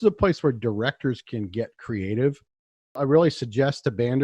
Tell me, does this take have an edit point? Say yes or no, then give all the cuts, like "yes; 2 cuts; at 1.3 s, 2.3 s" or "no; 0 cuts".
yes; 1 cut; at 3.0 s